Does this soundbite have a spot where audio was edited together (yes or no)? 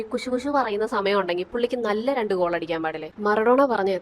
yes